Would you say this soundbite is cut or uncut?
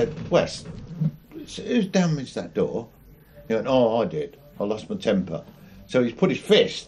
uncut